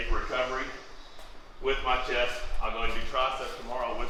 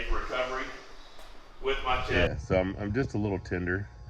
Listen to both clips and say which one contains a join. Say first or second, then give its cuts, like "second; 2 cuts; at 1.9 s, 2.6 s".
second; 1 cut; at 2.1 s